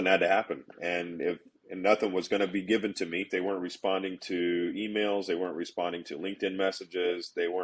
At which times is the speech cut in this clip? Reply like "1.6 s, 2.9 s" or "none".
3.3 s